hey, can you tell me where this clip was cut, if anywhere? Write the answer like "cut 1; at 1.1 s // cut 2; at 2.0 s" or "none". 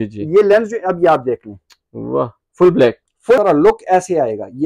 cut 1; at 3.4 s